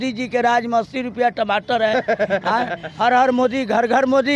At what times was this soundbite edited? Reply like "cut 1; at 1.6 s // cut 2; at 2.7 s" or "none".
none